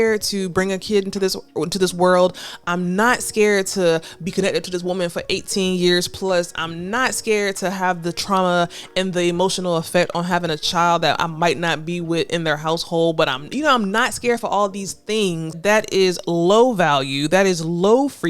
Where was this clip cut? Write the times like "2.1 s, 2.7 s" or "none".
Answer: 15.5 s